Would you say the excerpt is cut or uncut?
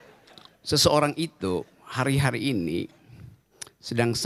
uncut